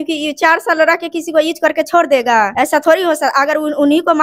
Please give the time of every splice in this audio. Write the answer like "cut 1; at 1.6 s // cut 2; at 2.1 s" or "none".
cut 1; at 2.5 s